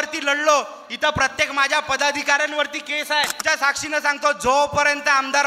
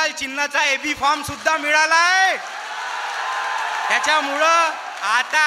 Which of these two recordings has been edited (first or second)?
first